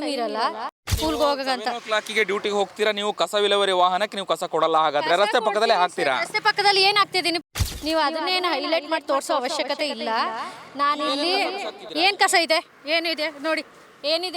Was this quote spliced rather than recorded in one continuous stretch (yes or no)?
yes